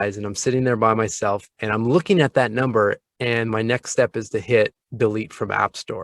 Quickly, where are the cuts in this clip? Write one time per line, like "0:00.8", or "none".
0:01.5